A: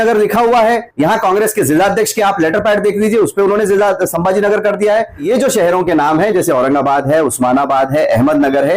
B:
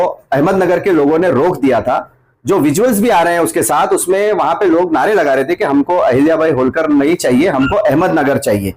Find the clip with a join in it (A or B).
A